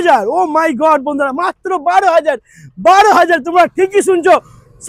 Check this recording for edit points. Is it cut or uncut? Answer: uncut